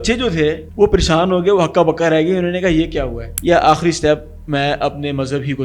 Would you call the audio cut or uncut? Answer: cut